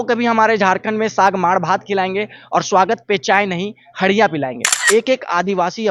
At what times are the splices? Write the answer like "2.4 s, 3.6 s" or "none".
4.7 s

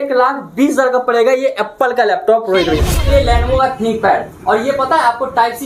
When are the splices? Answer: 3.1 s

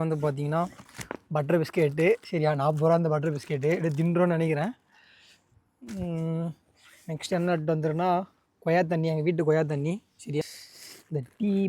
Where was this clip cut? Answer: 10.4 s

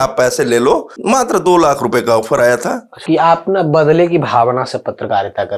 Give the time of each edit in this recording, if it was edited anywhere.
0.9 s, 3.0 s

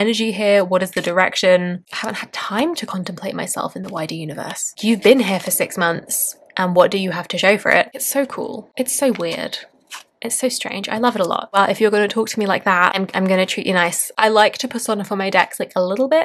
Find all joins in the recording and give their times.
1.8 s, 4.8 s, 8.0 s, 11.5 s, 14.1 s

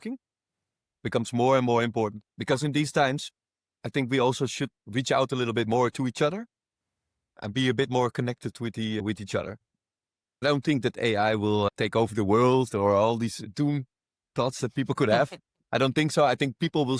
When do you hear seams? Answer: none

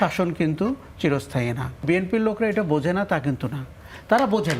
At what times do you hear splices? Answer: 1.8 s

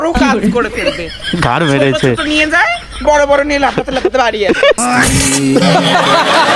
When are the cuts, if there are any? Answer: none

